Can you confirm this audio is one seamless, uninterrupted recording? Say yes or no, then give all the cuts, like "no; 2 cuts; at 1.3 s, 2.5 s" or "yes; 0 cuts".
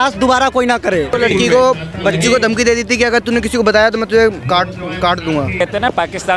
no; 2 cuts; at 1.2 s, 5.6 s